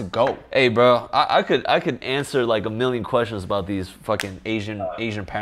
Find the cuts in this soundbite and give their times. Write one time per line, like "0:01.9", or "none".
none